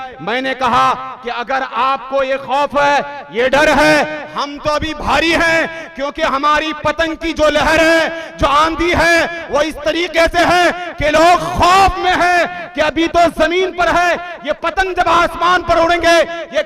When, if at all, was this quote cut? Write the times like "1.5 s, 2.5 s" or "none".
none